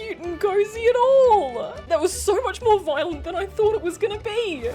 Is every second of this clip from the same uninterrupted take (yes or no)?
no